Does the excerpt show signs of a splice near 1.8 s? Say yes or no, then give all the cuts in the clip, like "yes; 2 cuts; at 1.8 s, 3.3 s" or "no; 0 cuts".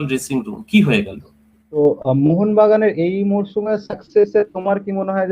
yes; 1 cut; at 1.8 s